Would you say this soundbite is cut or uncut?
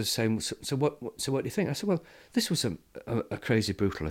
uncut